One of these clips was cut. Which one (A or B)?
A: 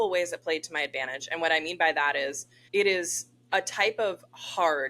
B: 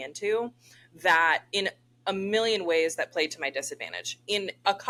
A